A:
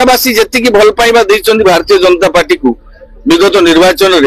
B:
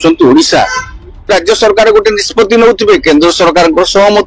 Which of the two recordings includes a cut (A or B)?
B